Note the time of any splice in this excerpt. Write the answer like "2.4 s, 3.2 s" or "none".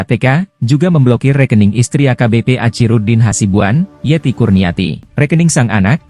5.1 s